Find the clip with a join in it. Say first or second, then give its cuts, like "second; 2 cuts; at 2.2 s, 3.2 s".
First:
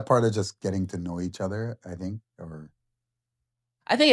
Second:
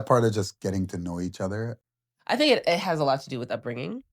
second; 1 cut; at 1.8 s